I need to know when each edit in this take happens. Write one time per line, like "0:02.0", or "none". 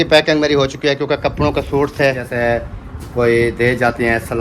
0:02.3